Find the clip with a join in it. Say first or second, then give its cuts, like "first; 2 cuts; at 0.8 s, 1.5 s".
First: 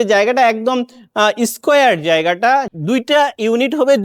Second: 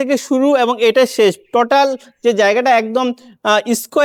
first; 1 cut; at 2.7 s